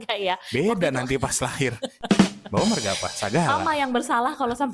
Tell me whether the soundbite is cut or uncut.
uncut